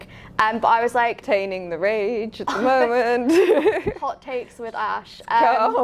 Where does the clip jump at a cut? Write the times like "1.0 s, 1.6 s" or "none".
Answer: 1.2 s